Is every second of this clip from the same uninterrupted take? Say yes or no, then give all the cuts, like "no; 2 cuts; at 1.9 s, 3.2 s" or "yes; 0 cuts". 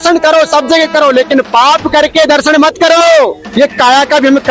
no; 1 cut; at 3.4 s